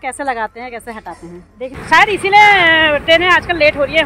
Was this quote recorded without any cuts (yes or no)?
no